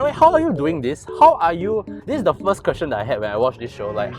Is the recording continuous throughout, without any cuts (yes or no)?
yes